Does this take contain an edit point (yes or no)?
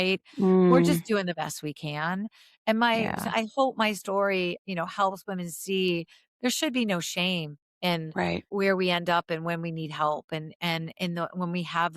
yes